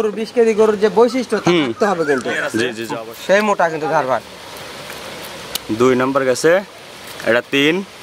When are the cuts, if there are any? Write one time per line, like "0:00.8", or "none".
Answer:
0:02.8